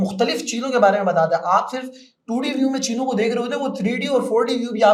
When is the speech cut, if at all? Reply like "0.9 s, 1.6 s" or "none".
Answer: none